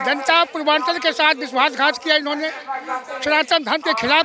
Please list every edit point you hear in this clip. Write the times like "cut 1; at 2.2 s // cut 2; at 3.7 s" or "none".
none